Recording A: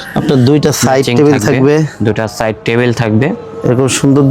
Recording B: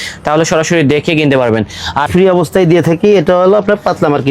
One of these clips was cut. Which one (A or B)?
B